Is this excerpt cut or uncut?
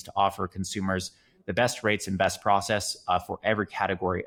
uncut